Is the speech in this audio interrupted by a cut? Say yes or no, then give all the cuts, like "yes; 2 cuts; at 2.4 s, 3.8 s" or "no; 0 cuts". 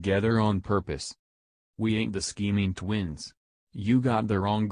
yes; 1 cut; at 1.3 s